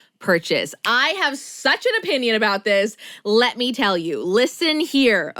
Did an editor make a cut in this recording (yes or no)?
no